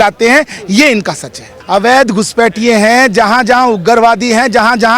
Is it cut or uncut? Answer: cut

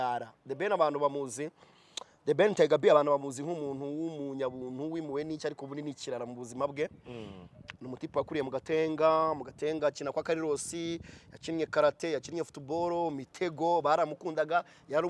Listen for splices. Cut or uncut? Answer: uncut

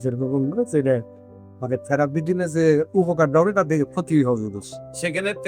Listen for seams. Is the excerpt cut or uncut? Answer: uncut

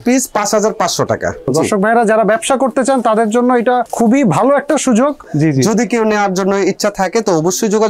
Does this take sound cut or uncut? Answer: cut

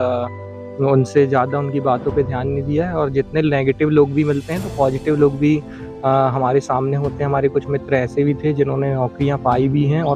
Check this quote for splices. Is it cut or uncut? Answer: uncut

